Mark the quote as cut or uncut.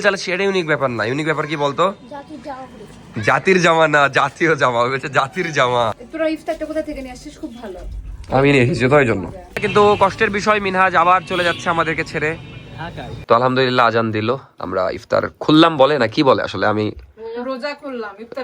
cut